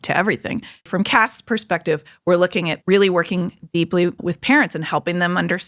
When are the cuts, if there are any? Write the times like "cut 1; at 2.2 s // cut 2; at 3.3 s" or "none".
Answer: cut 1; at 0.9 s // cut 2; at 2.7 s // cut 3; at 4.2 s